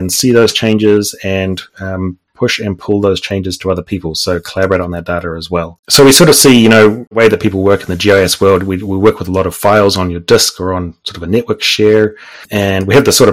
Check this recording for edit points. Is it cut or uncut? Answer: cut